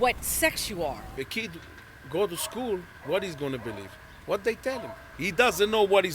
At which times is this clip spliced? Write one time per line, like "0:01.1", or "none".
0:01.1
0:05.0